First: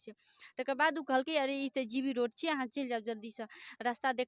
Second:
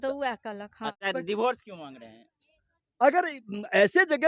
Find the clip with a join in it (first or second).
second